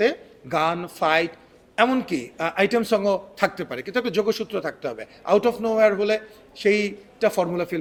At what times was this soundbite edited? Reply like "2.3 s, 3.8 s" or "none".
none